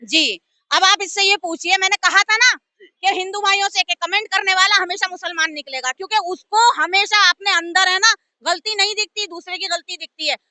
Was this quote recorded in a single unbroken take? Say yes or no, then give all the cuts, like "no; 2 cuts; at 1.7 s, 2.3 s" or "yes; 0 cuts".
yes; 0 cuts